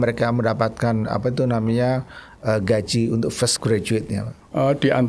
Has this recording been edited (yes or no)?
no